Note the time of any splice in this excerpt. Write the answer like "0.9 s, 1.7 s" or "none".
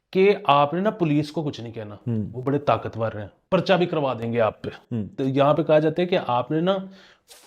3.4 s, 5.1 s